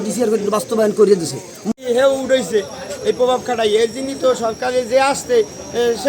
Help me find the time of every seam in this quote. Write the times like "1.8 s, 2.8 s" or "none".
1.7 s